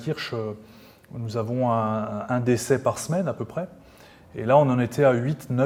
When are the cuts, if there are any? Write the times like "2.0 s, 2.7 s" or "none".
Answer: none